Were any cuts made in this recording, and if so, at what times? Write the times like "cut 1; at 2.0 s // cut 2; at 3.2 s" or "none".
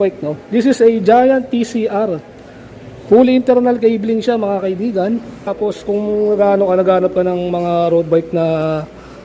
cut 1; at 5.5 s